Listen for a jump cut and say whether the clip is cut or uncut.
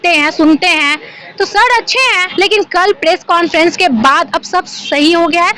cut